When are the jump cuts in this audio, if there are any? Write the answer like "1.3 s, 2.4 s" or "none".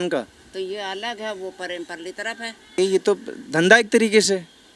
2.8 s